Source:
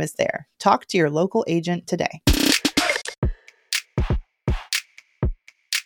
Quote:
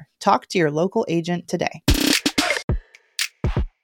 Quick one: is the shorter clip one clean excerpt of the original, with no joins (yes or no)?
no